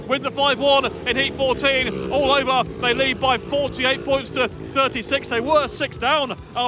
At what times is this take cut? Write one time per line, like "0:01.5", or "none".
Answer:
none